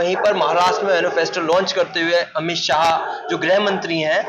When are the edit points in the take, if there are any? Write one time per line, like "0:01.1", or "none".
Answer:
none